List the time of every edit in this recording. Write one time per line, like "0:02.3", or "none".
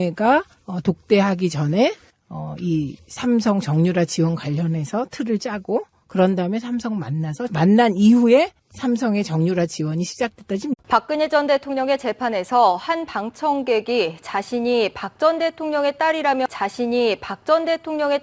none

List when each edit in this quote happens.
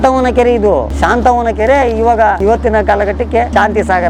none

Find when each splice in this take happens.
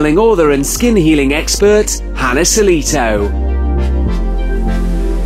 0:03.4

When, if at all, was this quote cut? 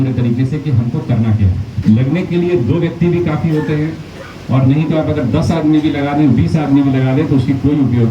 0:01.7

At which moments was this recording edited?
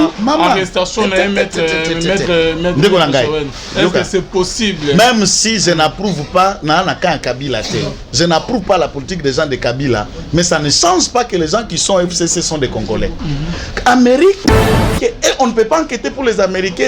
0:14.8

